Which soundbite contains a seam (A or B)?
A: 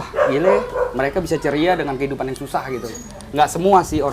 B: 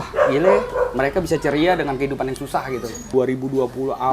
B